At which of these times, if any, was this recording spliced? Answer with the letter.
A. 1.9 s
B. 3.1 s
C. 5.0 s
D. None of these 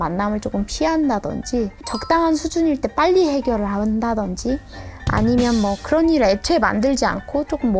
A